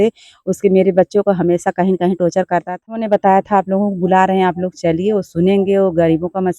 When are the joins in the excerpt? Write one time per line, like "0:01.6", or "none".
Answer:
0:03.0